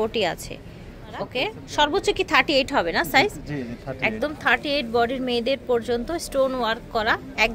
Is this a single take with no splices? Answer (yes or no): no